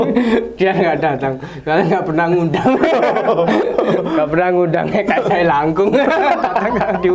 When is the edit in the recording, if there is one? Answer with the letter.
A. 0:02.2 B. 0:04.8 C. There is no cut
C